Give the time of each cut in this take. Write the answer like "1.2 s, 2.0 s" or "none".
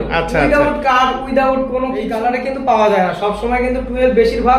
2.1 s